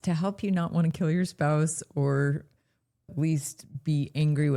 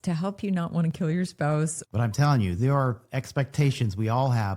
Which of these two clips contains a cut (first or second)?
second